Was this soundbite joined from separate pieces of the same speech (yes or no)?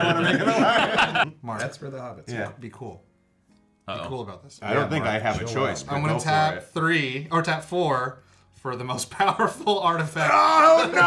yes